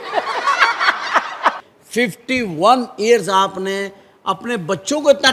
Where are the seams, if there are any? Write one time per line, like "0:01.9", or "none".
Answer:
0:01.6